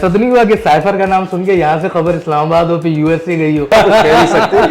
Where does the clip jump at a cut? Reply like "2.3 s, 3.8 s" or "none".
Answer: 3.7 s